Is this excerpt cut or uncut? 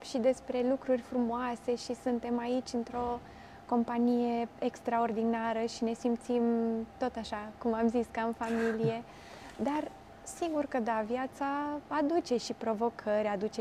uncut